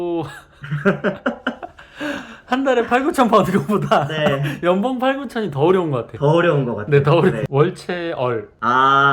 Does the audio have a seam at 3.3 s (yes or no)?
no